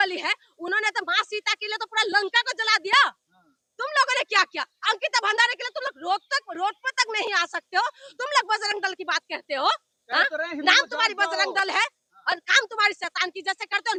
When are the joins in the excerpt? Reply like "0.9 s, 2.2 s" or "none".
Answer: none